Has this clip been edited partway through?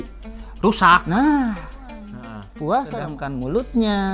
yes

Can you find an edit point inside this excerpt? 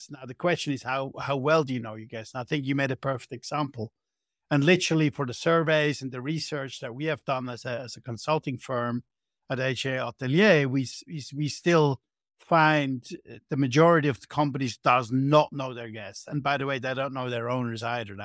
no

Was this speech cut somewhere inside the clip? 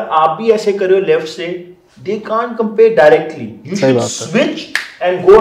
no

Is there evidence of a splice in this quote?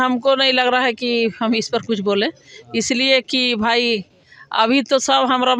no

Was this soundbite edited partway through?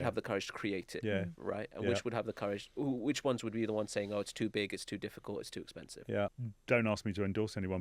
yes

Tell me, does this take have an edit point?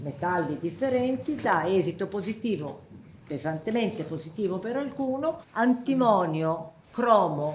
yes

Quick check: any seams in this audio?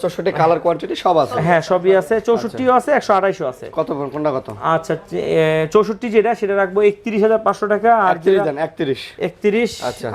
no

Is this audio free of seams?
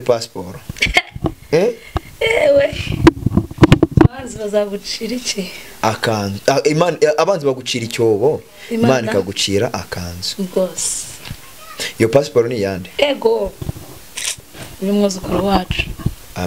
yes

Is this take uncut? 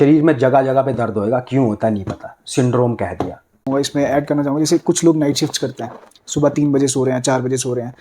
no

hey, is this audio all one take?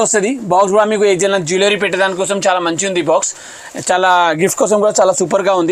yes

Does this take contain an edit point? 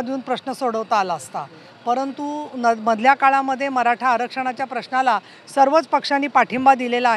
no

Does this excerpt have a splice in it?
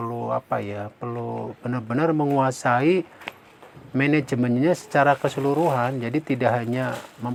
no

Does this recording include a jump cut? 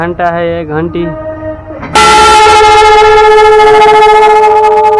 yes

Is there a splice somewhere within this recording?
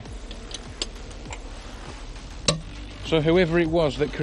yes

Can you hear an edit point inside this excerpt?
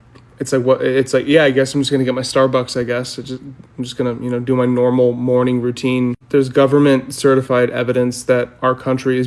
no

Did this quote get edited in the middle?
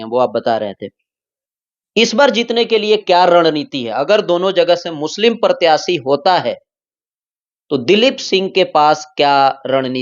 no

